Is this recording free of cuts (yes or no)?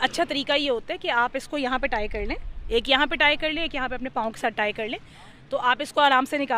yes